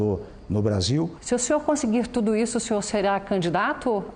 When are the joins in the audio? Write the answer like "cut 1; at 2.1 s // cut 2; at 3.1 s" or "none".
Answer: cut 1; at 1.2 s

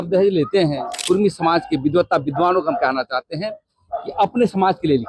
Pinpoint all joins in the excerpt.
cut 1; at 1.0 s

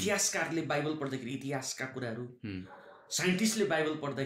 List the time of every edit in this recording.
none

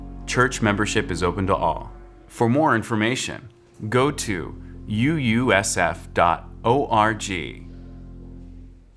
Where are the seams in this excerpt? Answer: cut 1; at 7.6 s

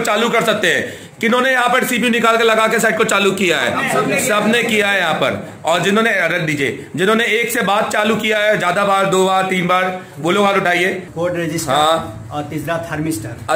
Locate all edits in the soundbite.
cut 1; at 11.1 s

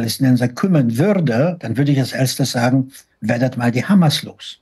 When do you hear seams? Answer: cut 1; at 1.6 s

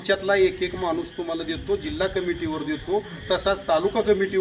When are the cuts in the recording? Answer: none

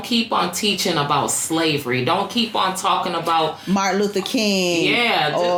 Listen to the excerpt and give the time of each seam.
none

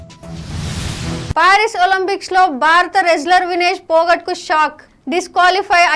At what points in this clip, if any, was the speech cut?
none

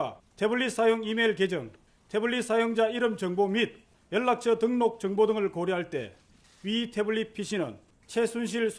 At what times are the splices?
cut 1; at 7.6 s

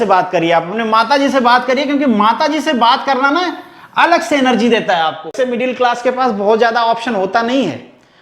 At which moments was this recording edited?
cut 1; at 5.4 s

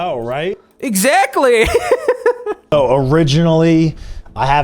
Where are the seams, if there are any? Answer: cut 1; at 2.5 s

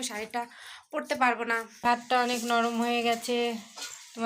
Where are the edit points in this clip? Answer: cut 1; at 1.8 s

